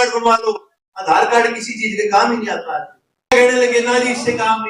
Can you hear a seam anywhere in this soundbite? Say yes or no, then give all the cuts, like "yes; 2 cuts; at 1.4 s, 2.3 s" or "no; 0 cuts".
yes; 1 cut; at 3.3 s